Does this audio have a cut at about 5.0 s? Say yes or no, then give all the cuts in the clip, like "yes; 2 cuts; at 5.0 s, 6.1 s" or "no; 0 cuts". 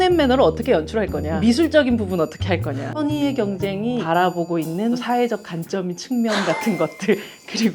yes; 4 cuts; at 1.3 s, 2.9 s, 4.0 s, 5.0 s